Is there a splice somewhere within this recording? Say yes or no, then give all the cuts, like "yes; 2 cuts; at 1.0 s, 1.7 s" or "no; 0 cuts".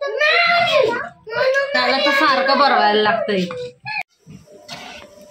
yes; 1 cut; at 3.9 s